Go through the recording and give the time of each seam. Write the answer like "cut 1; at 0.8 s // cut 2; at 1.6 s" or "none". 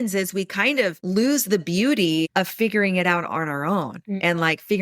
cut 1; at 1.0 s // cut 2; at 2.3 s